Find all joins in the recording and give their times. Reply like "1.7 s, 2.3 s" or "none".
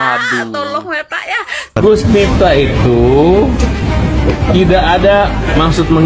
1.8 s